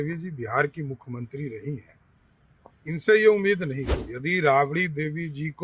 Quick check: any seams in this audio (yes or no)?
yes